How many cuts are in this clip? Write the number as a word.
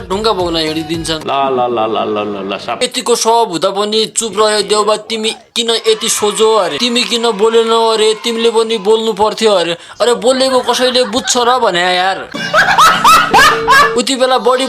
one